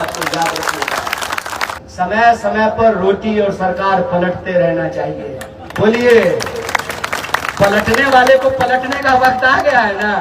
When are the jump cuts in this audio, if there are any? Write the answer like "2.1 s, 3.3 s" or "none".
1.8 s